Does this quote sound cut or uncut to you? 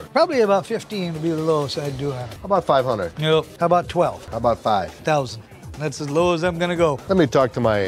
cut